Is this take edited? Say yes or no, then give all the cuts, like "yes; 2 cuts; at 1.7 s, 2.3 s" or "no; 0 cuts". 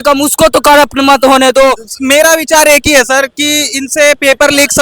yes; 1 cut; at 1.9 s